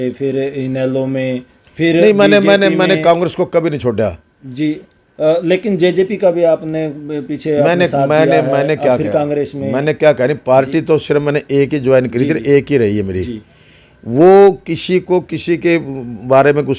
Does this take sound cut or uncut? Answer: uncut